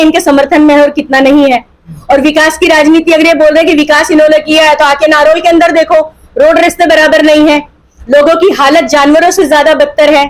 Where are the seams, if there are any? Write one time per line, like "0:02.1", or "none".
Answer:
none